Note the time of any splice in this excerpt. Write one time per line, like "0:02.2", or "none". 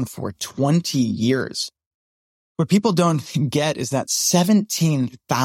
none

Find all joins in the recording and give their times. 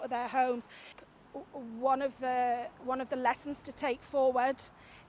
0:01.0

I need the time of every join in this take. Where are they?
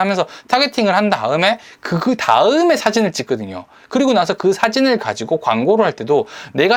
none

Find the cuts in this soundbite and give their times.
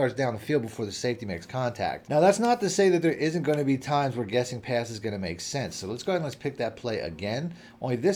none

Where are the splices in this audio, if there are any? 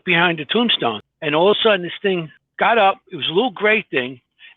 0:01.0
0:02.4

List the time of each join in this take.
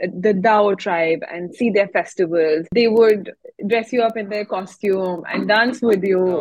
0:02.7

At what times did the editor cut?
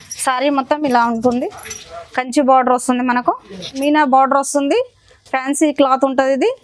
0:03.7

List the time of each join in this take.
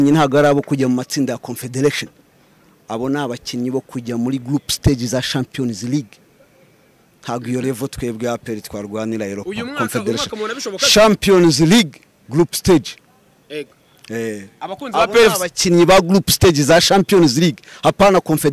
none

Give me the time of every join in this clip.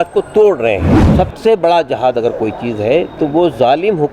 0:01.0

